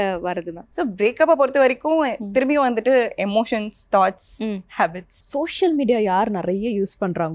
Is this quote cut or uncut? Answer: cut